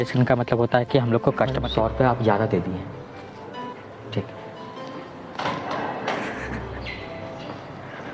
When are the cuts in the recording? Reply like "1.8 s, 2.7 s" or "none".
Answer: 1.6 s